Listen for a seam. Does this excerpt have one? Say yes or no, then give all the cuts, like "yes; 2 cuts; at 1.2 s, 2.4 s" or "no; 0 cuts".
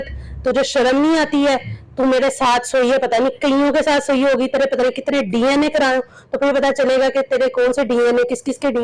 no; 0 cuts